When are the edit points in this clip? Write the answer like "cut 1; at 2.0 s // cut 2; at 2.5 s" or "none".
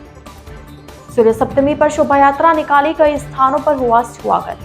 cut 1; at 0.9 s